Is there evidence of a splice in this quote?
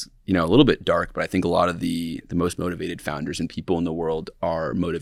no; 0 cuts

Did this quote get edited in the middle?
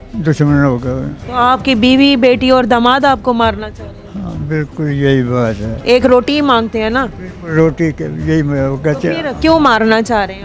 yes; 2 cuts; at 1.1 s, 5.8 s

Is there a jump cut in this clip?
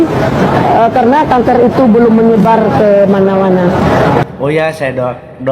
yes; 1 cut; at 4.2 s

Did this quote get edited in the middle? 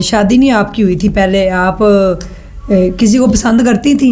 no; 0 cuts

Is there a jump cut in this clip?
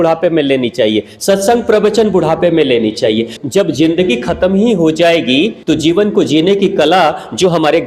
yes; 2 cuts; at 3.4 s, 5.6 s

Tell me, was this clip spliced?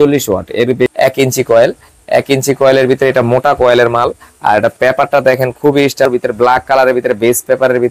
yes; 2 cuts; at 0.9 s, 6.1 s

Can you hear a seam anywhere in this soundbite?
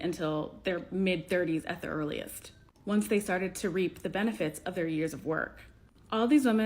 yes; 1 cut; at 5.0 s

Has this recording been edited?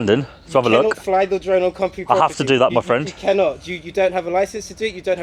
no; 0 cuts

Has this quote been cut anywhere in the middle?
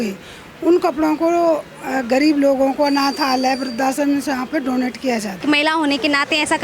yes; 1 cut; at 5.4 s

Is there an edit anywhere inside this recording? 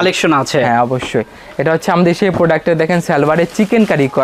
no; 0 cuts

